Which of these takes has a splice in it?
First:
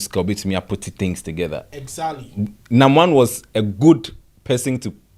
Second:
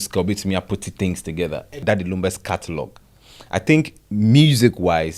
second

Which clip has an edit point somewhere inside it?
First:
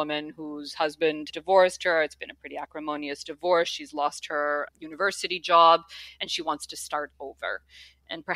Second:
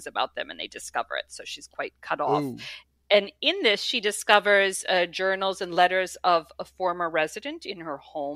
first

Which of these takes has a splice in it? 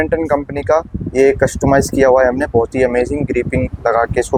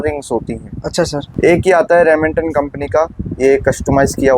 second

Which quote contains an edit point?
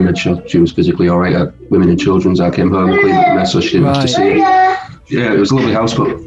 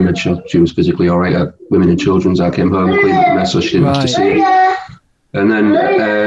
first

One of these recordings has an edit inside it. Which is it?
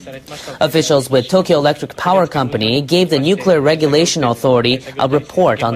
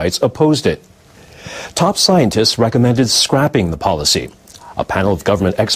second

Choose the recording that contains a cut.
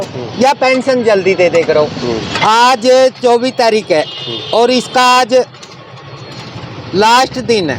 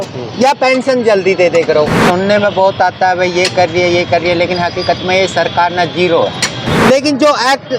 second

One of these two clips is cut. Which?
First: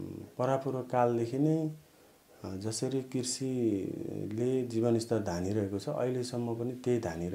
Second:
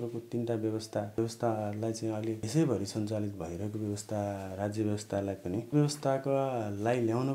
second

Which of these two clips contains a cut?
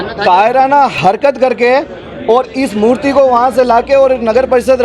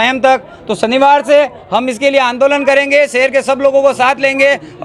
first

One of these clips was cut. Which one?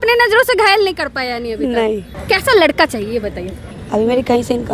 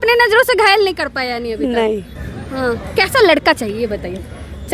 first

